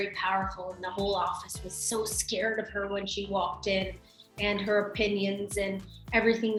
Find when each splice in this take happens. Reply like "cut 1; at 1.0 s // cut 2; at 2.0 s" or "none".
none

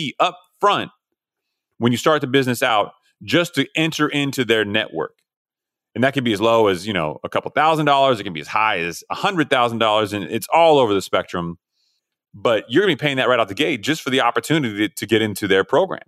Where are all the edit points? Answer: cut 1; at 15.0 s

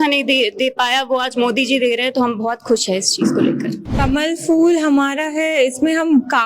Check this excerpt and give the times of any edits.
cut 1; at 3.9 s

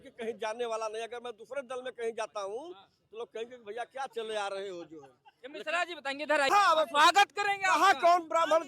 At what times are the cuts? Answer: cut 1; at 6.5 s

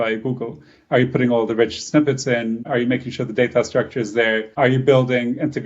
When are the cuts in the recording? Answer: cut 1; at 2.7 s // cut 2; at 4.6 s

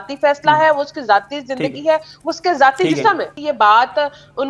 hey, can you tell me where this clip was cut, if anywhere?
cut 1; at 3.4 s

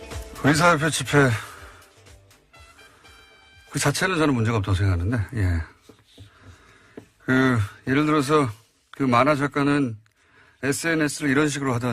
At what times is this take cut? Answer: cut 1; at 7.1 s

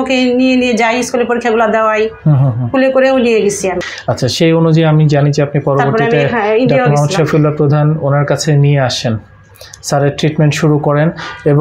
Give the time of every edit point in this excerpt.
cut 1; at 3.9 s

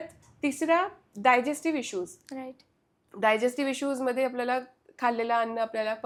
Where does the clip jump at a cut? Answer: none

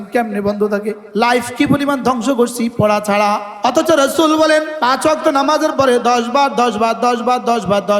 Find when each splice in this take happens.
cut 1; at 1.0 s // cut 2; at 3.5 s // cut 3; at 4.8 s

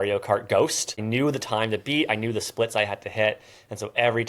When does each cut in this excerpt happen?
cut 1; at 1.0 s

